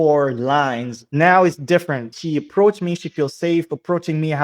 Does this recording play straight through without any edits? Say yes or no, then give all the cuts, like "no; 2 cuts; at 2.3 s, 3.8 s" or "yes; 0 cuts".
no; 2 cuts; at 1.0 s, 2.1 s